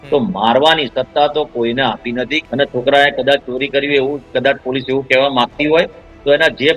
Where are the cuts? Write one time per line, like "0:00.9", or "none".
0:02.4

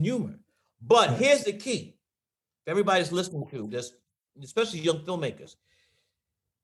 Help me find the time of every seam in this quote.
none

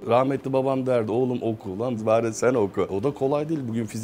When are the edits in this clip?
0:02.0
0:03.1

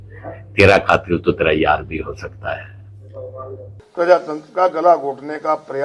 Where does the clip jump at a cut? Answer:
0:03.8

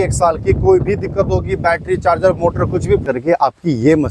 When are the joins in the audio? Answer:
0:03.1

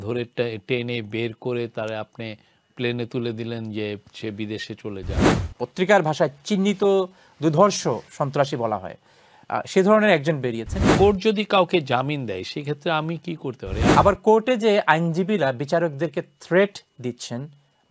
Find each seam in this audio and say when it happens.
0:05.4
0:10.8
0:13.7

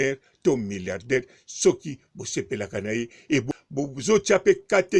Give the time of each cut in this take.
0:03.5

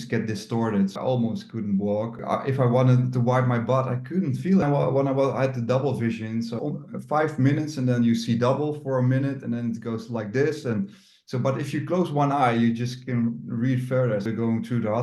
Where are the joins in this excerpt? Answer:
0:01.0
0:02.2
0:04.6
0:06.5
0:14.2

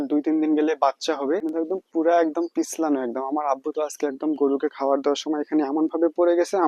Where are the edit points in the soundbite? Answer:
0:01.5

